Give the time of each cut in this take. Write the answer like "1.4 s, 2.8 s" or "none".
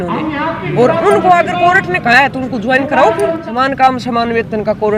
3.5 s